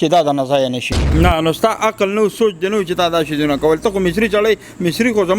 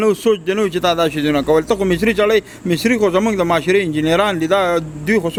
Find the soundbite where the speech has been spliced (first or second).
first